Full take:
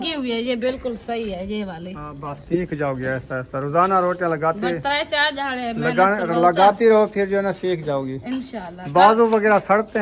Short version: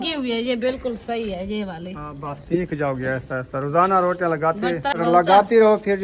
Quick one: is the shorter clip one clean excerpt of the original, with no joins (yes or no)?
no